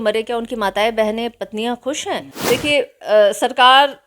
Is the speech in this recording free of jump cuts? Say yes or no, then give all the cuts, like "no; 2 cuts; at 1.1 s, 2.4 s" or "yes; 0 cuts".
no; 1 cut; at 2.3 s